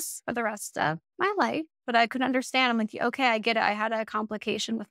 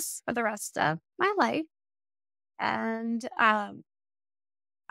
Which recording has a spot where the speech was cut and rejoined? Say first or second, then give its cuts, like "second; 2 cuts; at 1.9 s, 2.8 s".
first; 1 cut; at 1.8 s